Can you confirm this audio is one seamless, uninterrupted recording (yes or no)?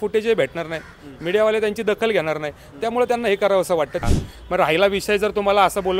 no